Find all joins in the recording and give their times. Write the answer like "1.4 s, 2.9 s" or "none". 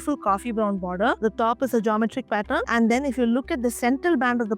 1.2 s